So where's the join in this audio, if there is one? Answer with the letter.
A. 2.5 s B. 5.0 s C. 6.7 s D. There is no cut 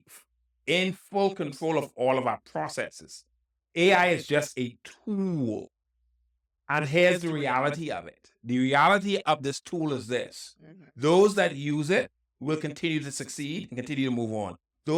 D